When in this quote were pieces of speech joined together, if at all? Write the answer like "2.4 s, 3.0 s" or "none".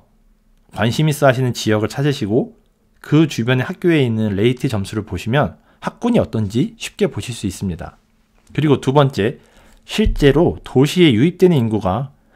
none